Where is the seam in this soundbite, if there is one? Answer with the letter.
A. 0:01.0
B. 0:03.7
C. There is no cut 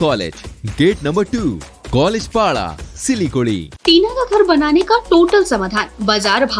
B